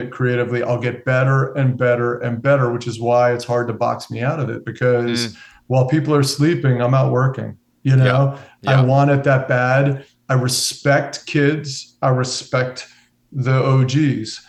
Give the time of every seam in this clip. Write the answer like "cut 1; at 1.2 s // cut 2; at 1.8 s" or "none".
none